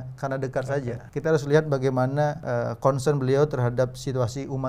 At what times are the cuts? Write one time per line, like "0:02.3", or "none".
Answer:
0:01.0
0:02.4